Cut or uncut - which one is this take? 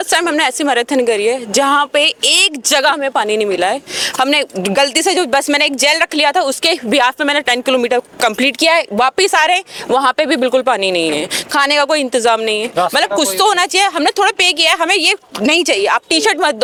uncut